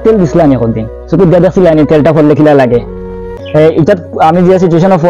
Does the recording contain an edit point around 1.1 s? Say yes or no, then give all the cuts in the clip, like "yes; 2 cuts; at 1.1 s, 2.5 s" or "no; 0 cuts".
no; 1 cut; at 3.3 s